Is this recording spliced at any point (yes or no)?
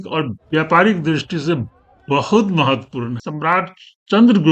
yes